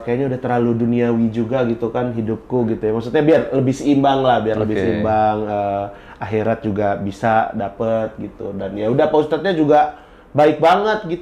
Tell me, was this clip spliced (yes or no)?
no